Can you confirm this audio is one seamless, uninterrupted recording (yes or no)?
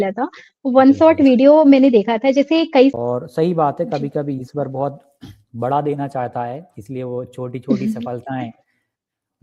no